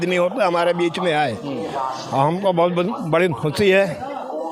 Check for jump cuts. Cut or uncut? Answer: uncut